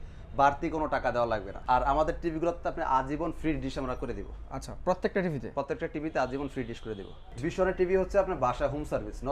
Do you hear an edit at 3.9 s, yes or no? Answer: no